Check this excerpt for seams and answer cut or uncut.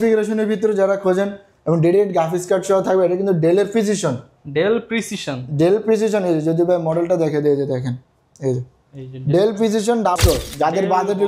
cut